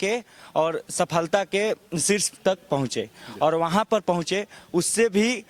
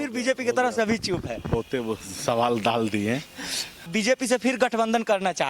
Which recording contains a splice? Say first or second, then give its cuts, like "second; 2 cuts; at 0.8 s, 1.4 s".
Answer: second; 1 cut; at 3.9 s